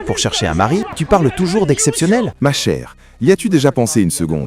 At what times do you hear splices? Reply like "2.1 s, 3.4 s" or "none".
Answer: 1.0 s, 2.3 s